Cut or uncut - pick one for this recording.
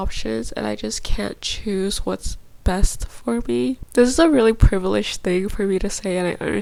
uncut